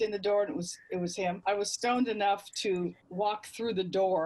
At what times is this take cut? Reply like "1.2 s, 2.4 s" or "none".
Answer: 1.4 s